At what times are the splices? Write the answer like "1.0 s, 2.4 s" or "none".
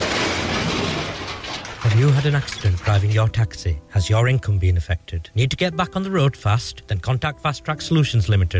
none